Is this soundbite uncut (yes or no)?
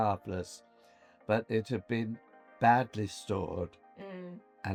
yes